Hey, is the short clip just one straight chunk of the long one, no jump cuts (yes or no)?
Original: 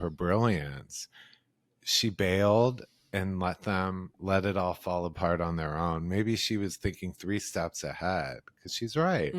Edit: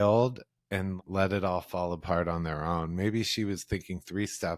no